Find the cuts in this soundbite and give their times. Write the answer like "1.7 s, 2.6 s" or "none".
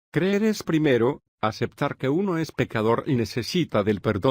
none